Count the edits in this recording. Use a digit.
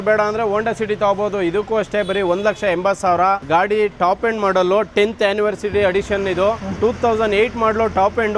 0